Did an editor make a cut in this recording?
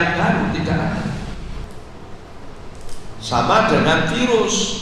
yes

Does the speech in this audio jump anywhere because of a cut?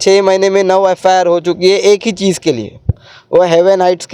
no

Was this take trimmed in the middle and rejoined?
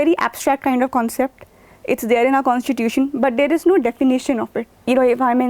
yes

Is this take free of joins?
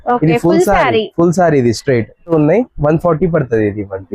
no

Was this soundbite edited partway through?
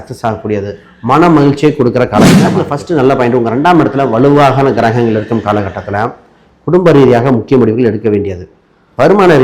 yes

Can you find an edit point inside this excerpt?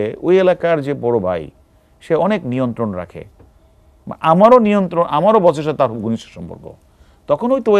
no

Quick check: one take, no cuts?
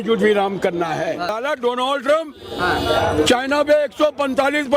no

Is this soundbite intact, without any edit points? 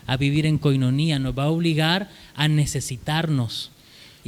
yes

